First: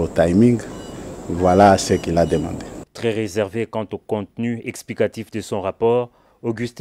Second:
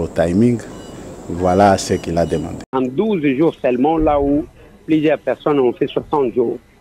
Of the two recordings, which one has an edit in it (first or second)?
second